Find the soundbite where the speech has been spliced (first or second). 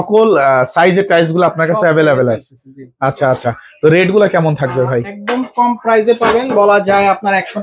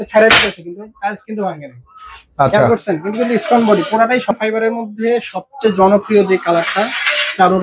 second